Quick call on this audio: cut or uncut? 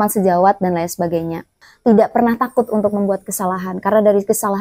cut